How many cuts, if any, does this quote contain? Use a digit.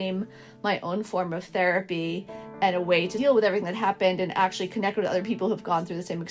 1